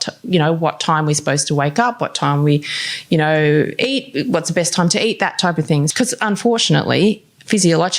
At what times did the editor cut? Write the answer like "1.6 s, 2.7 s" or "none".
5.9 s